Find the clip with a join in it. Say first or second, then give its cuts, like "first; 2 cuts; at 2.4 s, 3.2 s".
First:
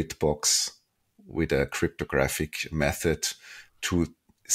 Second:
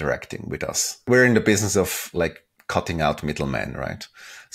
second; 1 cut; at 1.0 s